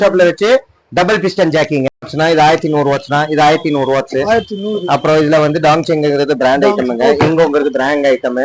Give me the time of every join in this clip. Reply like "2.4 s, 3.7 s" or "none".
2.1 s